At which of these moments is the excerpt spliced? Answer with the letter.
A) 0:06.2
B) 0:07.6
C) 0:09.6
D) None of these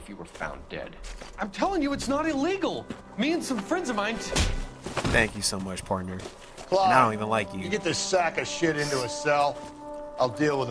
D